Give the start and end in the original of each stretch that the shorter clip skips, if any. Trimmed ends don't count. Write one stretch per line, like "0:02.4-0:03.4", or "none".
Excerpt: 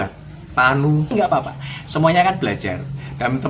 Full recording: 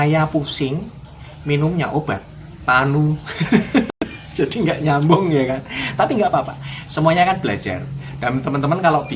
0:03.2-0:06.1